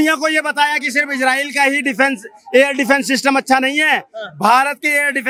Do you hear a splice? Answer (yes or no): no